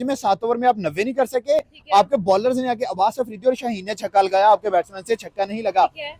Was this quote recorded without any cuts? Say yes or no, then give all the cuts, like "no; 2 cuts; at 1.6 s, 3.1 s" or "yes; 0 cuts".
yes; 0 cuts